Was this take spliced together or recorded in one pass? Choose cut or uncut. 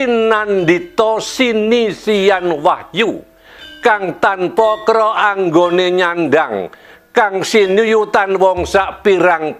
uncut